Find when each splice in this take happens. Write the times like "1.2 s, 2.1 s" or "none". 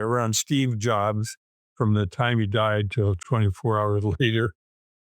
3.2 s